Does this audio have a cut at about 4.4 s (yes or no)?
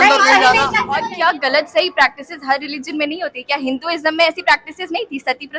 no